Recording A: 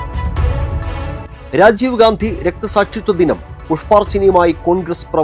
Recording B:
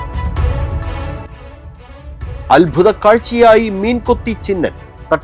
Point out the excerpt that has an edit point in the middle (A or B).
B